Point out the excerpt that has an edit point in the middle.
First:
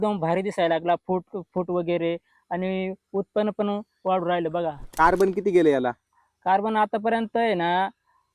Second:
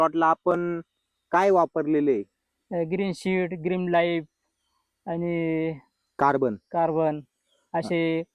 first; 1 cut; at 4.9 s

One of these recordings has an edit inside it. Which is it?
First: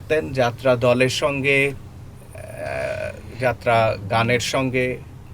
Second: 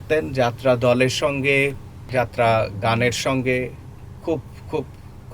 second; 1 cut; at 1.9 s

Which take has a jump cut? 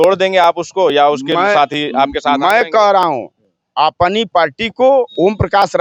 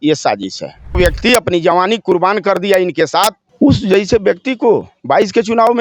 second; 2 cuts; at 1.0 s, 3.4 s

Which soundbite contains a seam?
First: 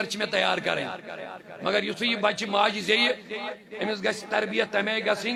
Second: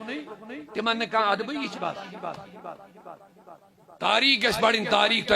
second; 1 cut; at 1.7 s

